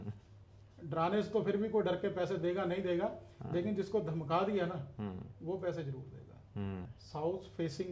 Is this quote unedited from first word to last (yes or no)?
no